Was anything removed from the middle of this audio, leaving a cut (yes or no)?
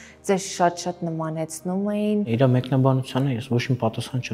yes